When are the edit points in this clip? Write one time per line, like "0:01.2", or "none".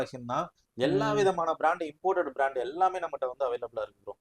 none